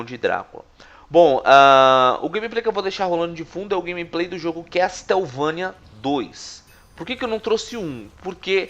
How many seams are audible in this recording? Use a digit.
1